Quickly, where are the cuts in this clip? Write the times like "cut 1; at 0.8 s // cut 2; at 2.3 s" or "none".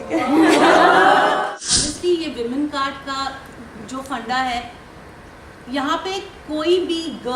cut 1; at 1.4 s